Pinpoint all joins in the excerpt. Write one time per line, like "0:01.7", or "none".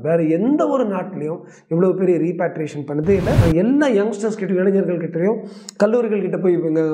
0:03.4